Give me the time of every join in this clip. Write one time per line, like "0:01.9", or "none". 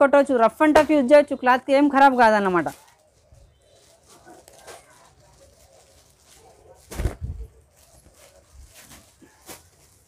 none